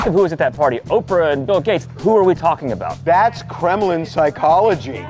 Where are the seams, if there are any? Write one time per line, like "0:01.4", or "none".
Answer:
0:01.8
0:03.0